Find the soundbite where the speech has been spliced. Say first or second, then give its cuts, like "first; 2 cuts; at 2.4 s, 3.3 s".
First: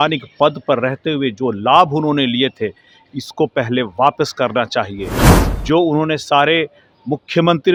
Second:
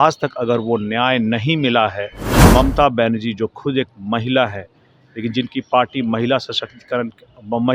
second; 1 cut; at 2.2 s